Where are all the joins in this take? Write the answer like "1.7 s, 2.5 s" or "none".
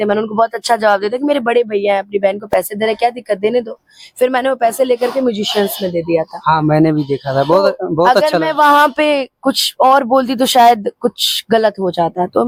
none